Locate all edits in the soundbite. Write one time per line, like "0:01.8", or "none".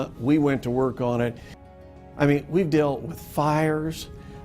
0:01.7